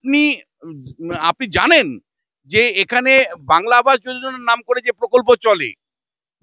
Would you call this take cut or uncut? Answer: uncut